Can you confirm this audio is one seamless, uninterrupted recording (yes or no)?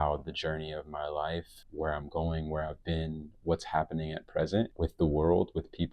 no